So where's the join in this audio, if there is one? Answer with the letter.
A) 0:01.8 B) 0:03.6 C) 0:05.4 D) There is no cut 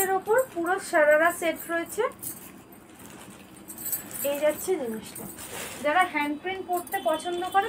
D